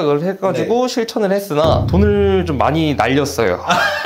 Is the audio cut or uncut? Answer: uncut